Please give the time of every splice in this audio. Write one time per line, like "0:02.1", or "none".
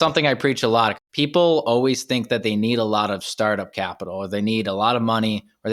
0:01.0